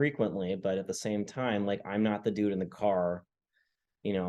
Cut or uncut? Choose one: uncut